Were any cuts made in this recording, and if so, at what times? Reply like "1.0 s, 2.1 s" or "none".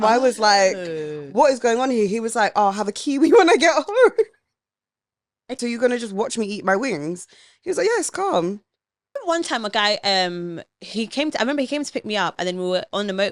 5.5 s, 9.2 s